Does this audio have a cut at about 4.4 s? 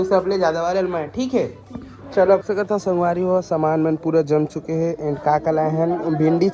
no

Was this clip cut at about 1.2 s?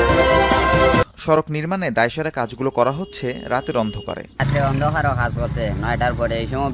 yes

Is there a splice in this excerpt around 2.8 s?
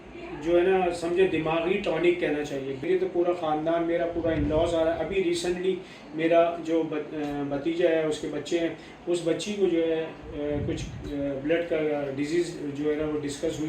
yes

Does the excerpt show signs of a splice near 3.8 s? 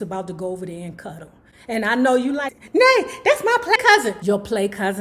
yes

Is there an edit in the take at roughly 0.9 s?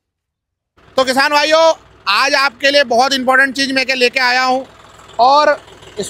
yes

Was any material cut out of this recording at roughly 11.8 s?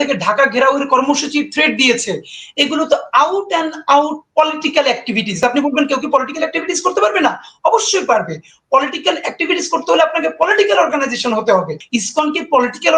yes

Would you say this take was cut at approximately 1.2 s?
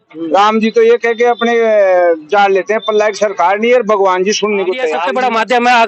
no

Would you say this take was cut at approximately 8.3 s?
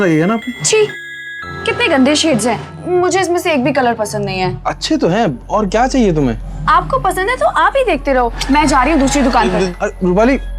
no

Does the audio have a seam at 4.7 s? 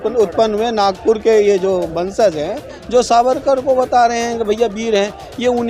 no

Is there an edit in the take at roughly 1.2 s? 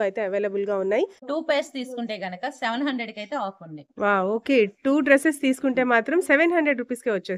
yes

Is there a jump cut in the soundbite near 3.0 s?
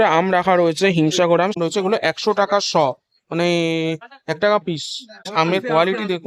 no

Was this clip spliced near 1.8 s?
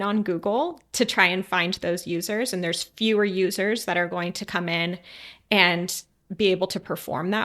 no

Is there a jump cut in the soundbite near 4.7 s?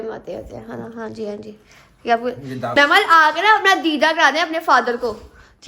no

